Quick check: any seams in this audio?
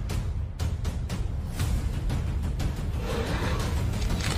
no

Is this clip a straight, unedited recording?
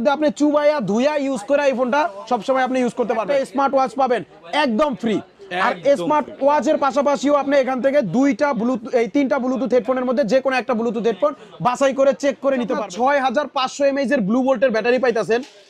no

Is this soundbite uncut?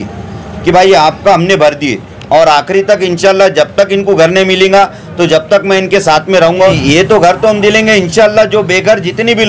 no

